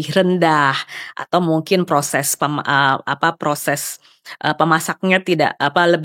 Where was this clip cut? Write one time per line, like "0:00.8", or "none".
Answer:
none